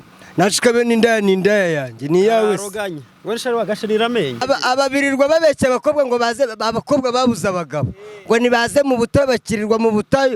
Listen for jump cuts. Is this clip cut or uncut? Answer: cut